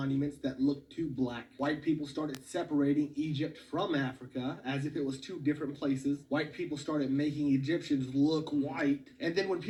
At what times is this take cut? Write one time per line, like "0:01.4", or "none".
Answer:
none